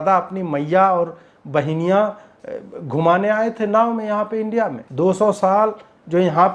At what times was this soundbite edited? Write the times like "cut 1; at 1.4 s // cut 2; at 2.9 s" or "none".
cut 1; at 4.8 s